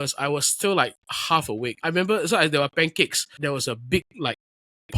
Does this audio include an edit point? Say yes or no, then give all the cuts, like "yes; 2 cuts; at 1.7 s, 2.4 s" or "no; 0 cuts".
yes; 2 cuts; at 1.6 s, 3.4 s